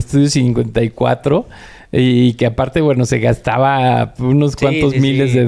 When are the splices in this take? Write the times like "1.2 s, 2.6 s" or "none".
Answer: none